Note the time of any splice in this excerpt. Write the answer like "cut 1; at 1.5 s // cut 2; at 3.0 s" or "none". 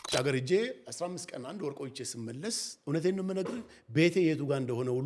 none